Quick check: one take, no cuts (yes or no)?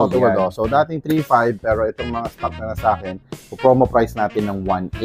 yes